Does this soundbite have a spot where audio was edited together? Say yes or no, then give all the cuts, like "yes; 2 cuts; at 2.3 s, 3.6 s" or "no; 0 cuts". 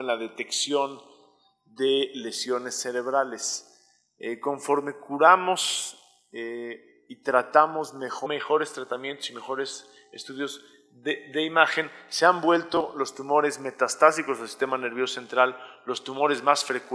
no; 0 cuts